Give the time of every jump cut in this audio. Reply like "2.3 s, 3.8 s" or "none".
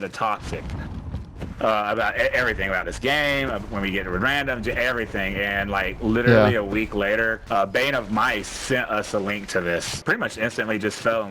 7.4 s, 10.0 s